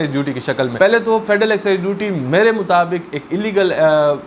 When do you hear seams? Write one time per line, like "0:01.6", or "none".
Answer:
none